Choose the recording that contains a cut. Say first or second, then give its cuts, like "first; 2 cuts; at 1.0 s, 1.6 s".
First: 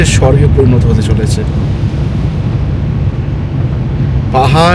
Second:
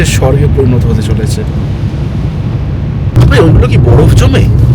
second; 1 cut; at 3.1 s